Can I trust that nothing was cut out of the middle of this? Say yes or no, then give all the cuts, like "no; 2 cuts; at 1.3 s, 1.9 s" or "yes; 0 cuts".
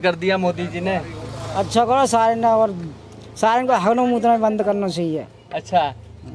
yes; 0 cuts